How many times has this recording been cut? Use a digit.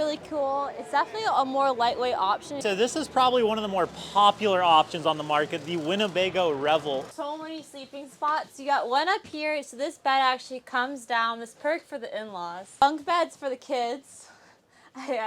3